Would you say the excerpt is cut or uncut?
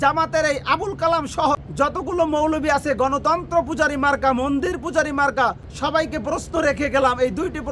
cut